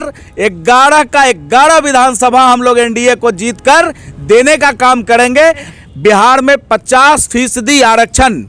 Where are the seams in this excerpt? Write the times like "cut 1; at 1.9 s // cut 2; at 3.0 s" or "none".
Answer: cut 1; at 5.7 s